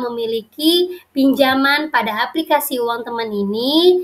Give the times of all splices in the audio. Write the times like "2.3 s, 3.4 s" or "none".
none